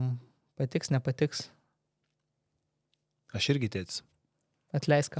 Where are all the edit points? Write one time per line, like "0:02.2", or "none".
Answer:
none